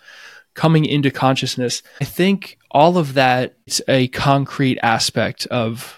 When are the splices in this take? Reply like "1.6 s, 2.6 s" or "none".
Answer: 2.1 s, 3.8 s